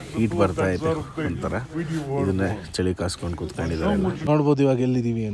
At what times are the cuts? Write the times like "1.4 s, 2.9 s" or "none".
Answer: 4.2 s